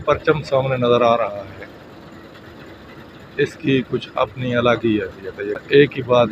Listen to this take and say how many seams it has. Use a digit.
1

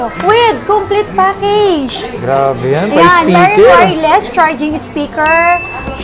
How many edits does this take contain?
0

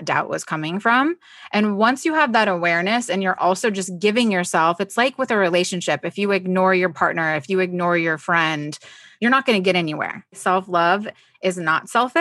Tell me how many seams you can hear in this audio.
1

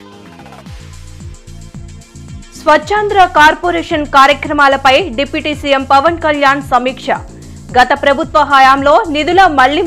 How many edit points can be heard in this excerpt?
2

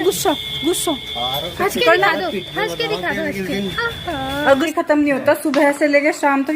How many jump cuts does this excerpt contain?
1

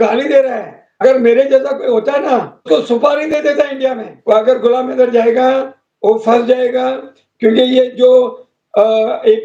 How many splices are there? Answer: 3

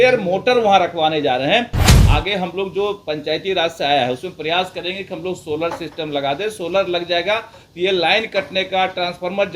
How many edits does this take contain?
1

